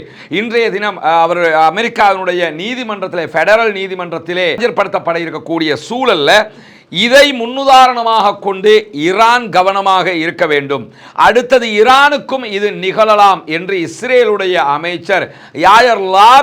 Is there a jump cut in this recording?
no; 0 cuts

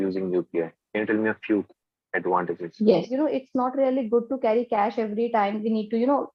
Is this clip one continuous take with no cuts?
no; 1 cut; at 3.1 s

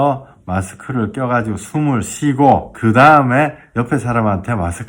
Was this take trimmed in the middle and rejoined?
yes; 1 cut; at 2.7 s

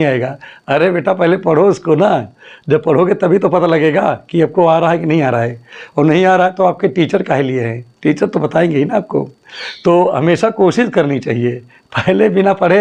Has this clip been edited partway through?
no; 0 cuts

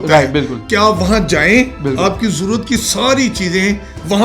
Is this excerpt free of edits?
yes; 0 cuts

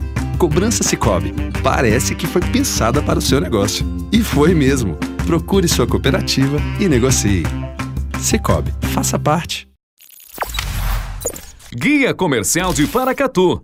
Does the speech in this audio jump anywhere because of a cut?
no; 0 cuts

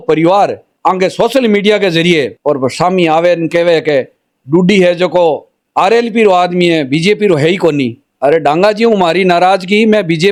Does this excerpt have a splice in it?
no; 0 cuts

